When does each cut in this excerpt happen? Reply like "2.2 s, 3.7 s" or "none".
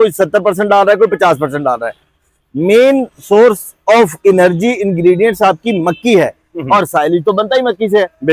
none